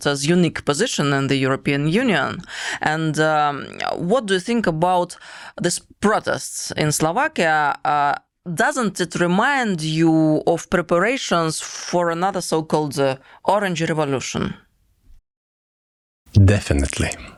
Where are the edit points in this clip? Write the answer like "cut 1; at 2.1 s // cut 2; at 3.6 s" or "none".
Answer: none